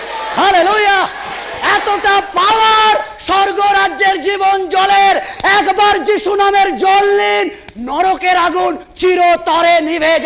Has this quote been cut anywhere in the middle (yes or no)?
no